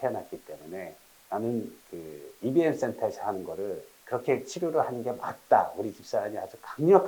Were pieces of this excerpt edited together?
no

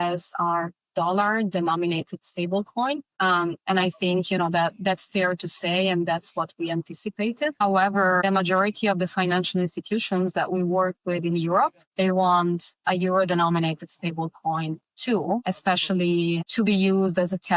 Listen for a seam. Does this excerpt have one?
no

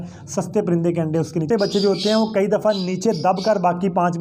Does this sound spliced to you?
yes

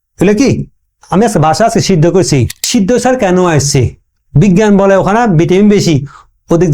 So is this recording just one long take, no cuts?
no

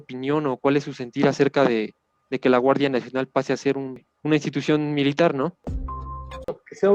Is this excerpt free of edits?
no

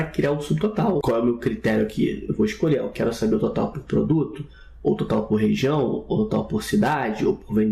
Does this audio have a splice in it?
yes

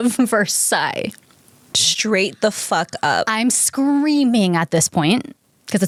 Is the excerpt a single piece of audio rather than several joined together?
yes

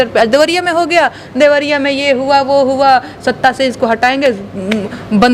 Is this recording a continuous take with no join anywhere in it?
yes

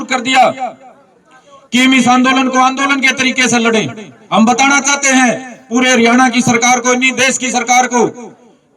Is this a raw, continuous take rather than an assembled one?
yes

